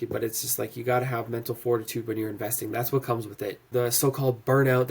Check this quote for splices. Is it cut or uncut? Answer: cut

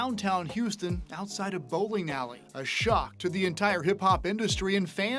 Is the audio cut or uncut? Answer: uncut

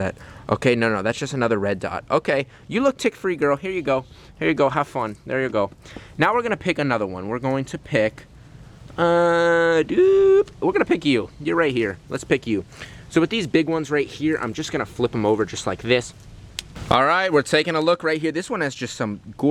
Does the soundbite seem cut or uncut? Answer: uncut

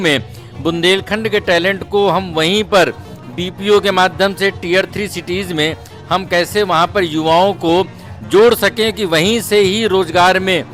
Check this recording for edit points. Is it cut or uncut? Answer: uncut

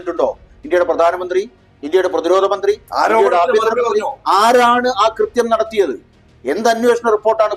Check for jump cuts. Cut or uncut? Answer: uncut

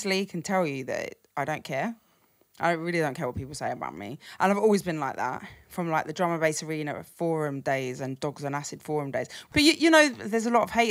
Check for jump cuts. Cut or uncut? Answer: cut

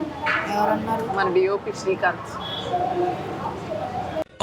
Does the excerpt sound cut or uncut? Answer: uncut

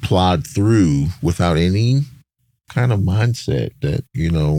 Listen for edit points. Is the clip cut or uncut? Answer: uncut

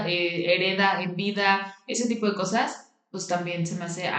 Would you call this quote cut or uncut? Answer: uncut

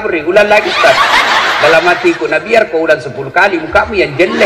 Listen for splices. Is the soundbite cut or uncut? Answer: uncut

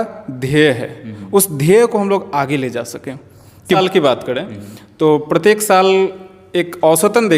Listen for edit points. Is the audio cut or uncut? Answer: cut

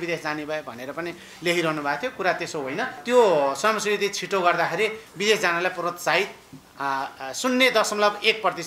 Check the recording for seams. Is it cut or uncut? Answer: cut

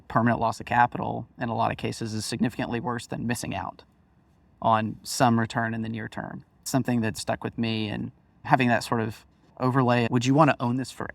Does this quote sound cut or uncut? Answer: cut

